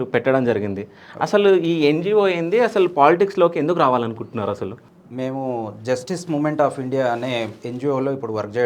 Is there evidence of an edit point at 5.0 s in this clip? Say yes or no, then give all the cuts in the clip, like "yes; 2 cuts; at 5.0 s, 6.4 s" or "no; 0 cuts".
no; 0 cuts